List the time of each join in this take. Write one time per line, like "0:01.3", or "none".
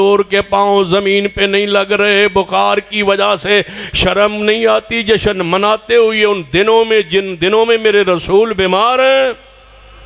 none